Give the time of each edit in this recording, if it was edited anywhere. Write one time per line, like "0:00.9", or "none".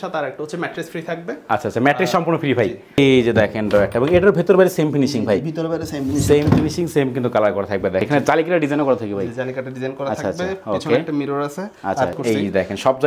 0:03.0
0:08.0
0:12.2